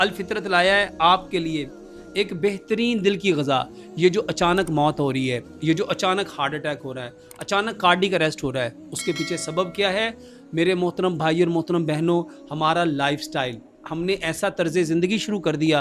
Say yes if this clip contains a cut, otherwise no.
no